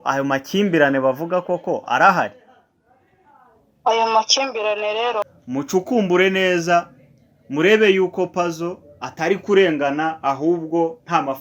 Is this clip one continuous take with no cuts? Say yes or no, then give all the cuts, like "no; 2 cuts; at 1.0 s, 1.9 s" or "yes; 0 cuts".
no; 1 cut; at 5.3 s